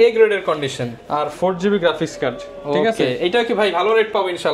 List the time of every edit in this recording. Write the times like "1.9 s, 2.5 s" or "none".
none